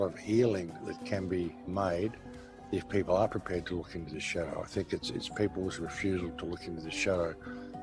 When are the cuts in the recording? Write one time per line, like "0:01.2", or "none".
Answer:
0:01.6